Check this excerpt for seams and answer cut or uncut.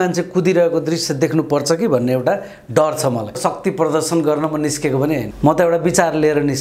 cut